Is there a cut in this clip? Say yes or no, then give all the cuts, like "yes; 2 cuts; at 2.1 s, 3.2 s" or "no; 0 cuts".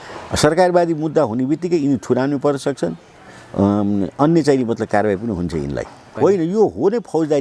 yes; 1 cut; at 6.1 s